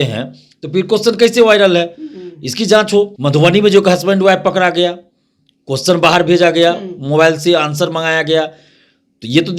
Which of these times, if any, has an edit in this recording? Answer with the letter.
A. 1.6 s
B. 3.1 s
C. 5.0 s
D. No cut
B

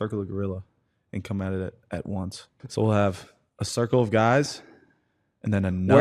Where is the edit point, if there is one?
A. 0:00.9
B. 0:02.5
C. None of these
B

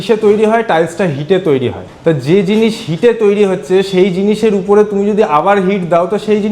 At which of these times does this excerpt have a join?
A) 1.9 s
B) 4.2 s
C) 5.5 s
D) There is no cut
A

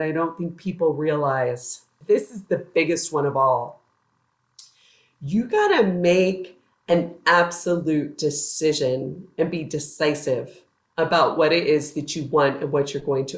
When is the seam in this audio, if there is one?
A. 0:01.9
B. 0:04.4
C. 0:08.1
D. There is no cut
A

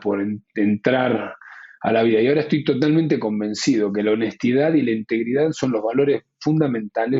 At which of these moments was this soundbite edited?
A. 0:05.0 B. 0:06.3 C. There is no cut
C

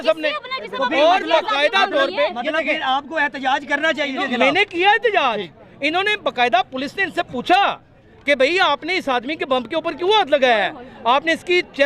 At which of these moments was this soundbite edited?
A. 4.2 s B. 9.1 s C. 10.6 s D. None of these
A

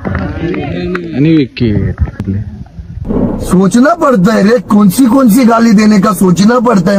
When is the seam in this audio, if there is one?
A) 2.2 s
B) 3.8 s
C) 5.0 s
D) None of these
A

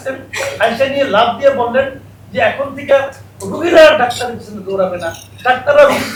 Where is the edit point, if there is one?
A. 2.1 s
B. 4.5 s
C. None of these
C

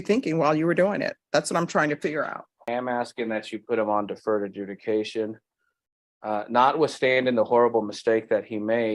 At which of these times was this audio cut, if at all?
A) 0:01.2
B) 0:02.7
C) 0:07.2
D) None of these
B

